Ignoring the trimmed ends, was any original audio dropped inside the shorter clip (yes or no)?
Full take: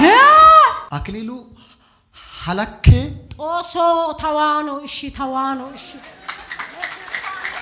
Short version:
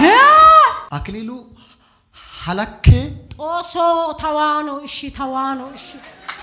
no